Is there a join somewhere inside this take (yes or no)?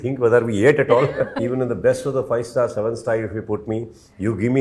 yes